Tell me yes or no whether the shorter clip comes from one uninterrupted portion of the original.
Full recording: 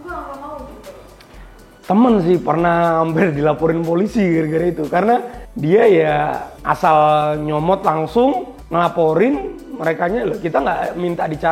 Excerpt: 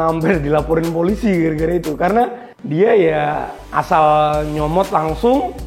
yes